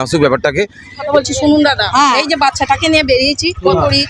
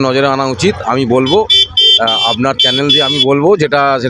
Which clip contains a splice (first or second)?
first